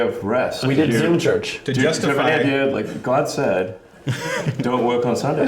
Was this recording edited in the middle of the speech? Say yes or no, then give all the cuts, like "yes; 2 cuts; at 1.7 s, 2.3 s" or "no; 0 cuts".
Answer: yes; 1 cut; at 2.5 s